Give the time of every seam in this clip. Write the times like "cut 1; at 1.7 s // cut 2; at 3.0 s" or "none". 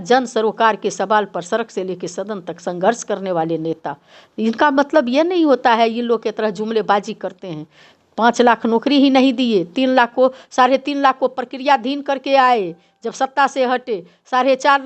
none